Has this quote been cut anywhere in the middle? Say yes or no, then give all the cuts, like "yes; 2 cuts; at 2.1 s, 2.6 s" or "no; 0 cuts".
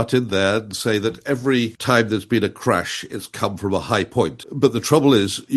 yes; 2 cuts; at 1.8 s, 4.4 s